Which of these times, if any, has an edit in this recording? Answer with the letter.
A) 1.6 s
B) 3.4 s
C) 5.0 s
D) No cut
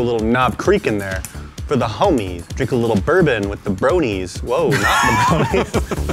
D